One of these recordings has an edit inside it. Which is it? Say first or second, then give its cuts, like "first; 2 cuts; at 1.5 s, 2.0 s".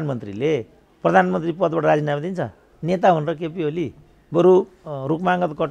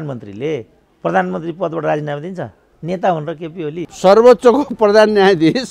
second; 1 cut; at 3.9 s